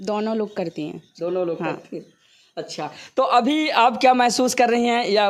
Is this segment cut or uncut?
uncut